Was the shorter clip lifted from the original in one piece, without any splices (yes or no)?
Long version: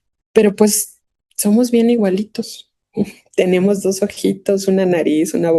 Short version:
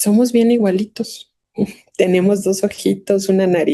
yes